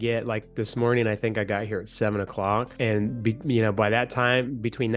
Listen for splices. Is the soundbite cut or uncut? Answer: cut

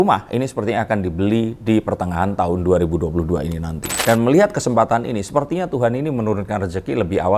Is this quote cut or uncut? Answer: cut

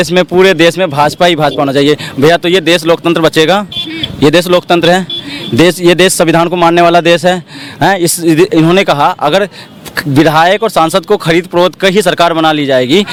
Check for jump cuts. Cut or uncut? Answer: uncut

